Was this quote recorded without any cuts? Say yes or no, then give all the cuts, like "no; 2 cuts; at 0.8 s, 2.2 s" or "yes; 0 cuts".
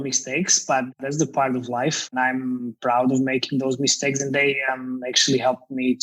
no; 2 cuts; at 1.0 s, 2.1 s